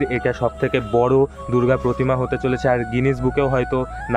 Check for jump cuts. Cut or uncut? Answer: uncut